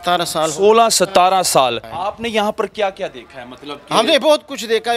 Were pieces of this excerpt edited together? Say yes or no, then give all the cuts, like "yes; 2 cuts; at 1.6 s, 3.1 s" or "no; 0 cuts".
yes; 1 cut; at 1.9 s